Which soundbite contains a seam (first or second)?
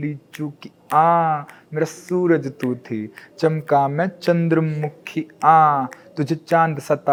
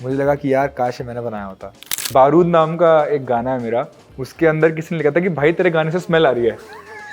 second